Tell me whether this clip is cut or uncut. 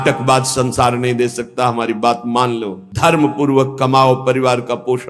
cut